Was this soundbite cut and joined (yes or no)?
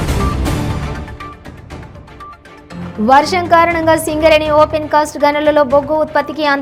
no